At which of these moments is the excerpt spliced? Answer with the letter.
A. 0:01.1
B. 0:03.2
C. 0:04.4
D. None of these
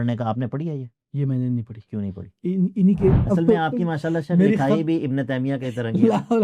B